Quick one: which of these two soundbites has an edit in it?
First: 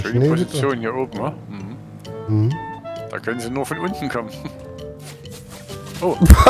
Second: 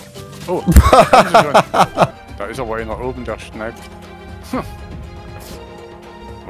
second; 1 cut; at 2.2 s

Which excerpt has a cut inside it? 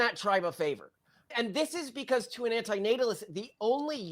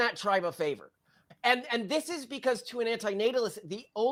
first; 1 cut; at 1.3 s

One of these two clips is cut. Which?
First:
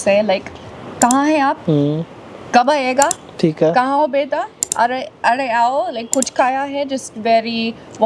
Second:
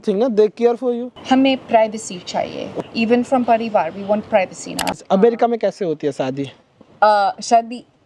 second; 3 cuts; at 1.1 s, 2.8 s, 4.9 s

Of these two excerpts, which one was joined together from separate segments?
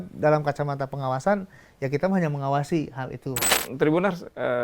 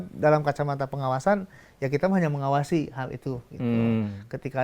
first; 1 cut; at 3.5 s

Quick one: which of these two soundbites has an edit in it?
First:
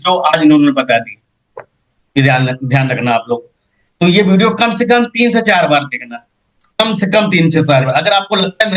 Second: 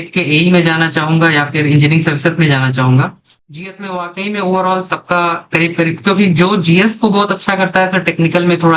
second; 1 cut; at 3.3 s

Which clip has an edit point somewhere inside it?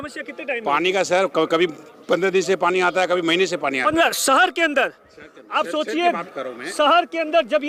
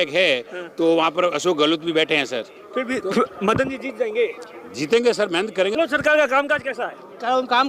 second; 1 cut; at 5.8 s

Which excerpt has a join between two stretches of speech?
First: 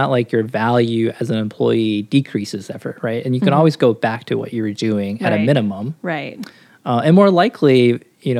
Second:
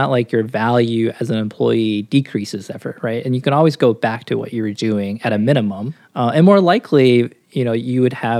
second; 1 cut; at 5.9 s

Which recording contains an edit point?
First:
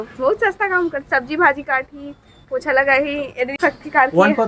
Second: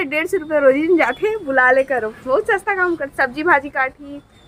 first; 1 cut; at 3.6 s

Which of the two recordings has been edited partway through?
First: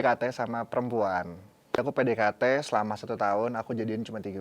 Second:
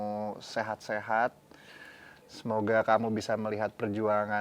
first; 1 cut; at 1.8 s

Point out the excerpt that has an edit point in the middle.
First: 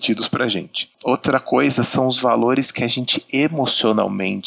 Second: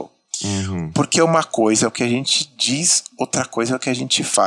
first; 1 cut; at 0.9 s

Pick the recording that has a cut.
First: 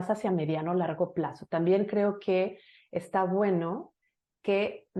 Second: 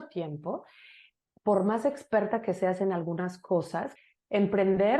second; 1 cut; at 3.9 s

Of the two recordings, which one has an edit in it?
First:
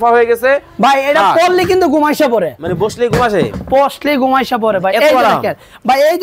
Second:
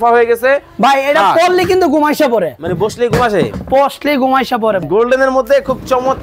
second; 1 cut; at 4.8 s

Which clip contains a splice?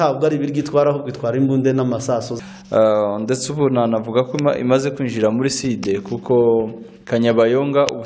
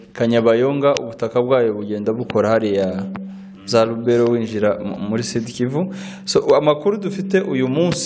first; 1 cut; at 2.3 s

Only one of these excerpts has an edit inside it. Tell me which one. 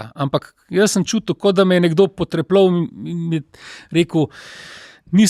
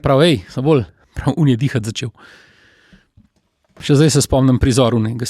second; 2 cuts; at 1.1 s, 3.8 s

